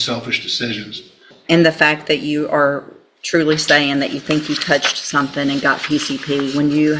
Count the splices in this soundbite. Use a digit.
1